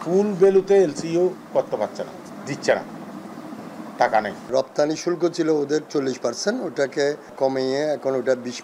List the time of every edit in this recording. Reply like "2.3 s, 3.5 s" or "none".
2.3 s, 4.5 s, 7.3 s